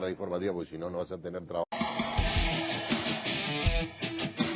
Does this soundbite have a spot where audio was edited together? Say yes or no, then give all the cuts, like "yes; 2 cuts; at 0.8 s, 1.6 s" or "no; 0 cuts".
no; 0 cuts